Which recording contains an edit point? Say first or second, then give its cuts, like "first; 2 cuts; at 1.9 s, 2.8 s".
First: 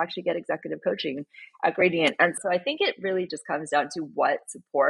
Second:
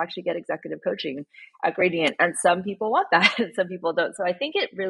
first; 1 cut; at 2.4 s